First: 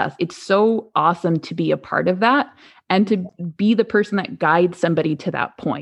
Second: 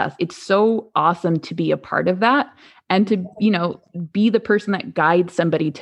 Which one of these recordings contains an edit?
first; 1 cut; at 3.3 s

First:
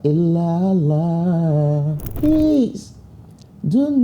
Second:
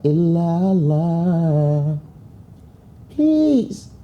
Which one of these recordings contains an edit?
first; 1 cut; at 2.0 s

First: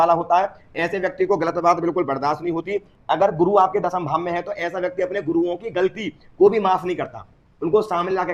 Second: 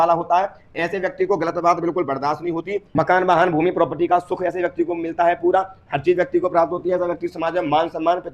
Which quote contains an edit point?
second; 1 cut; at 2.9 s

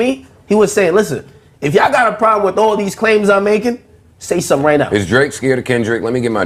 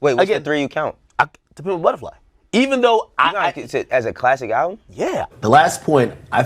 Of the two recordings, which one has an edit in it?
second; 1 cut; at 5.3 s

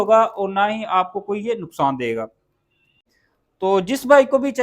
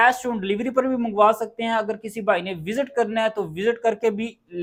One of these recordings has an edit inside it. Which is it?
first; 1 cut; at 2.9 s

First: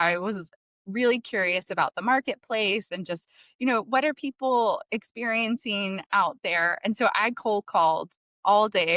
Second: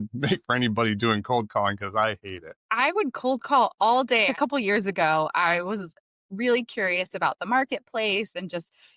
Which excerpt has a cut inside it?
second; 2 cuts; at 2.6 s, 4.3 s

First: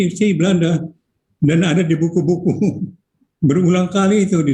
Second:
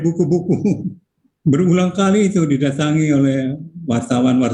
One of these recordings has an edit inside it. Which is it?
first; 1 cut; at 1.0 s

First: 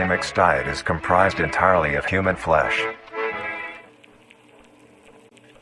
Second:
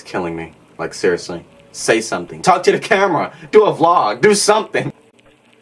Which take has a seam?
second; 2 cuts; at 2.3 s, 4.8 s

